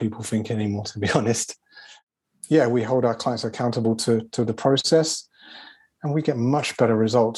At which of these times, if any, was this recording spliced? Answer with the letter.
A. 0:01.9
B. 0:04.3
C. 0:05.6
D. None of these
A